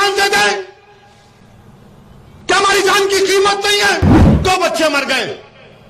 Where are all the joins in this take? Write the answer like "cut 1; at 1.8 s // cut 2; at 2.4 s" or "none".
cut 1; at 4.2 s